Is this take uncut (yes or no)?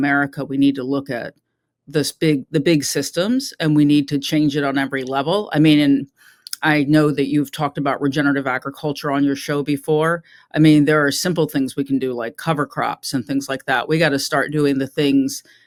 yes